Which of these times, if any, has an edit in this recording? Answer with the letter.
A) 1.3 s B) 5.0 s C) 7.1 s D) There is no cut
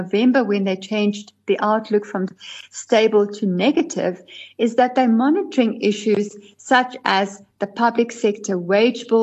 D